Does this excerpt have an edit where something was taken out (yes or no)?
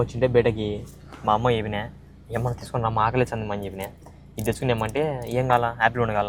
no